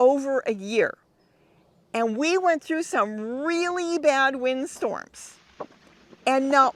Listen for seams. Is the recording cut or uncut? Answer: uncut